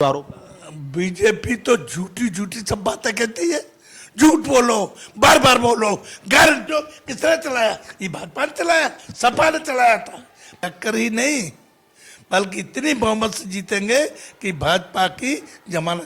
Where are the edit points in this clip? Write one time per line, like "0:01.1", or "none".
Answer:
0:06.7
0:10.5